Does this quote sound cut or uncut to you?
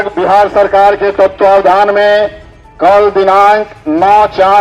uncut